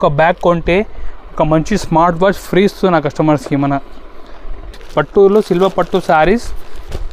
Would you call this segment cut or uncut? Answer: cut